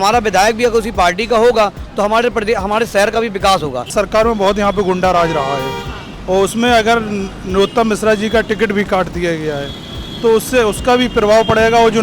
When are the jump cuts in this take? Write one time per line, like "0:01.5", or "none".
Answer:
0:03.9